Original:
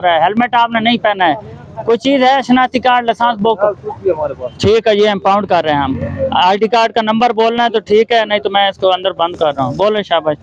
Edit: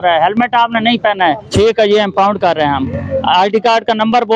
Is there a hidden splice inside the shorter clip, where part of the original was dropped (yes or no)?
yes